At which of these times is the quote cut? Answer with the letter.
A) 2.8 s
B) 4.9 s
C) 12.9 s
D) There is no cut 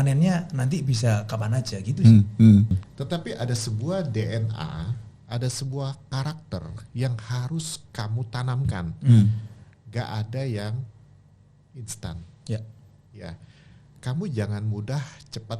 A